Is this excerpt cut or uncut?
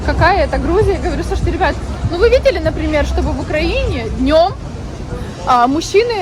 uncut